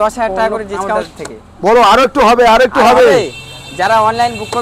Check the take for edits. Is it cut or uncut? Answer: cut